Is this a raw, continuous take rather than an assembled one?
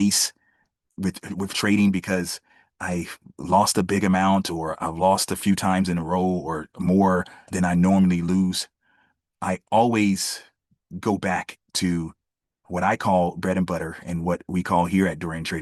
yes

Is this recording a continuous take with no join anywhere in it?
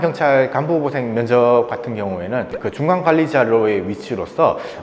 yes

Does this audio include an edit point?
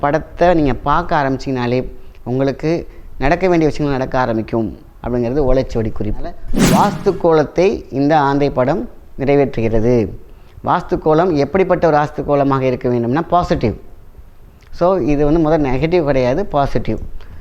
yes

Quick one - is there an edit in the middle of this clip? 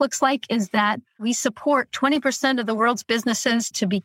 no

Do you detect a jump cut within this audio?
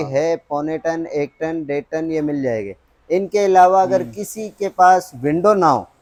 no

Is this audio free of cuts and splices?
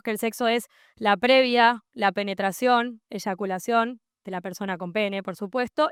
yes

